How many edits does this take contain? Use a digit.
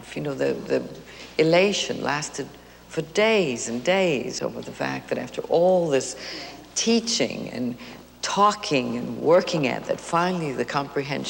0